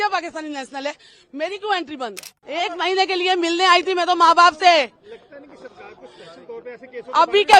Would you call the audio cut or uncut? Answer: cut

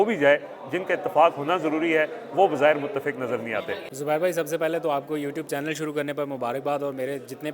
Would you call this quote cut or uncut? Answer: cut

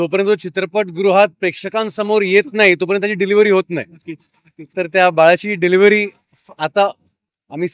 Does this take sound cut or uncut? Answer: uncut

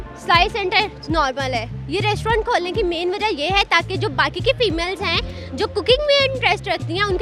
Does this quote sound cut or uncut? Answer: uncut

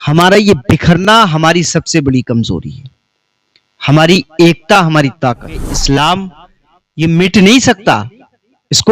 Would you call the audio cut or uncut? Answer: cut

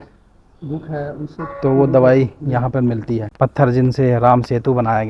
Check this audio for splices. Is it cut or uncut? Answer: cut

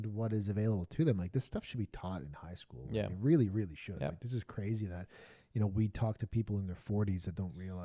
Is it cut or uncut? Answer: uncut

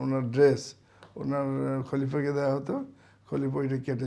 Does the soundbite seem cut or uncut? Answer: uncut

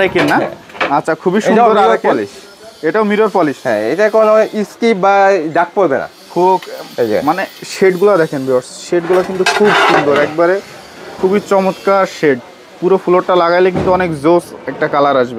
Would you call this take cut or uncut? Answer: uncut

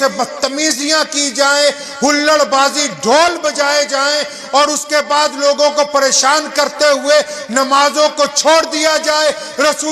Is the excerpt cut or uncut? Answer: uncut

